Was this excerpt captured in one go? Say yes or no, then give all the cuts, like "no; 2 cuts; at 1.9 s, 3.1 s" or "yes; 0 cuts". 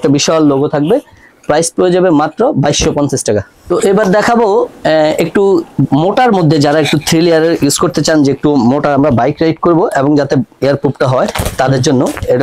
yes; 0 cuts